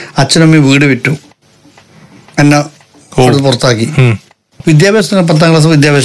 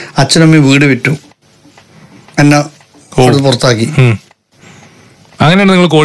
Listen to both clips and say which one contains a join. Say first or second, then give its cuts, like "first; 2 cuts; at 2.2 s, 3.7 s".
first; 1 cut; at 4.6 s